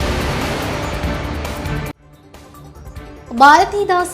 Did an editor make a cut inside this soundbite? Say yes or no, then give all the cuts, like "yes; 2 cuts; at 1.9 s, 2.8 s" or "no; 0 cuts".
yes; 1 cut; at 2.6 s